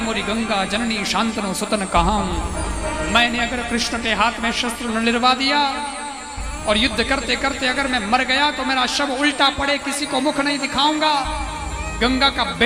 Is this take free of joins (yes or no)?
yes